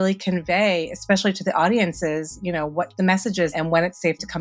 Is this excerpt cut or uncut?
cut